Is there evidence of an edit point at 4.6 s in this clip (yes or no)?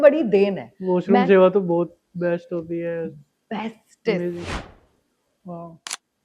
yes